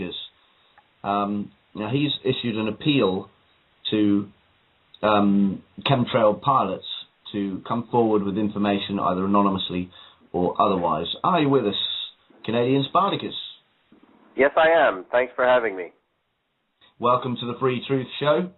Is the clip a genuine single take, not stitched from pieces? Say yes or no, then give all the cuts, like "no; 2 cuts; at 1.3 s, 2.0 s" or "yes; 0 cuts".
no; 1 cut; at 11.5 s